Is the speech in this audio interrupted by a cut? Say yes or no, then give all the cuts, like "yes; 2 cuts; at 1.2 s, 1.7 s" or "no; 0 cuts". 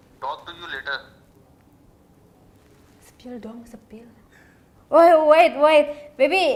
no; 0 cuts